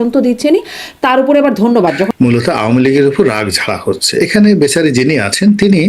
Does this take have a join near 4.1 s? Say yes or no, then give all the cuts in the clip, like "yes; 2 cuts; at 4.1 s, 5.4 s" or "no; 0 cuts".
no; 1 cut; at 2.1 s